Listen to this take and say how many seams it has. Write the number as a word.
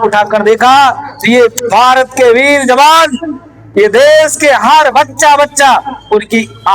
zero